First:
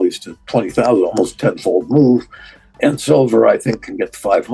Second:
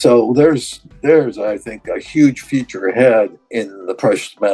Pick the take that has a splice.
first; 1 cut; at 2.6 s

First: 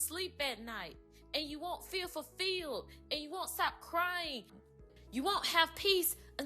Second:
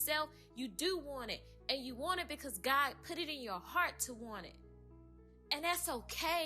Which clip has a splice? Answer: first; 1 cut; at 4.9 s

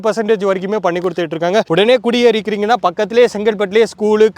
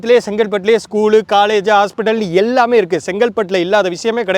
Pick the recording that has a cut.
first; 1 cut; at 1.7 s

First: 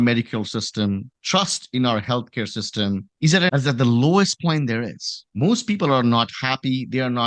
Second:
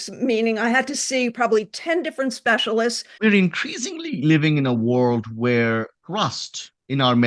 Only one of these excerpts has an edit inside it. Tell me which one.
second; 1 cut; at 3.1 s

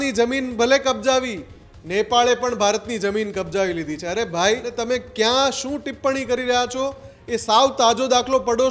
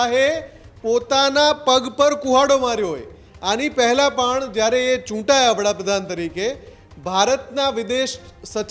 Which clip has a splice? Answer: first; 1 cut; at 4.7 s

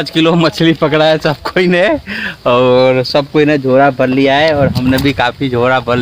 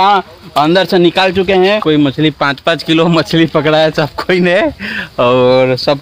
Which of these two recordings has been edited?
second; 1 cut; at 1.8 s

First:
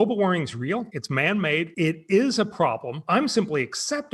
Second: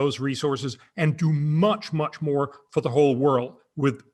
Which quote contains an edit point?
first; 3 cuts; at 1.0 s, 1.7 s, 2.9 s

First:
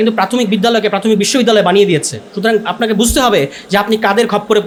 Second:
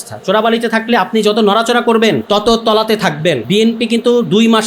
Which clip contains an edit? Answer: second; 2 cuts; at 2.2 s, 3.4 s

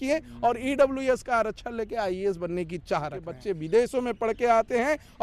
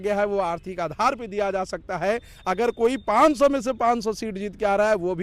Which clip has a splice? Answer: first; 1 cut; at 3.4 s

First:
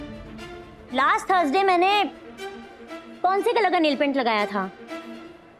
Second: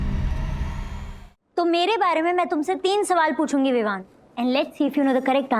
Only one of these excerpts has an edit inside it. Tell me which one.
second; 1 cut; at 1.0 s

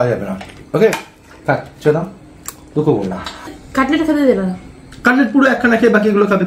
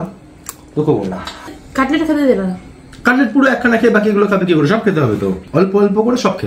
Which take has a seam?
second; 1 cut; at 5.4 s

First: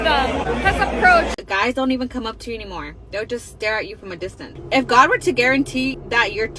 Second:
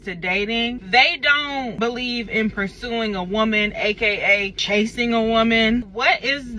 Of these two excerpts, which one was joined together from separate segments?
first; 2 cuts; at 1.4 s, 4.5 s

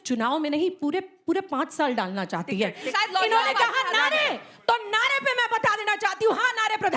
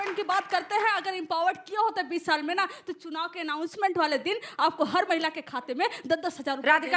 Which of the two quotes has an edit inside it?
first; 1 cut; at 2.9 s

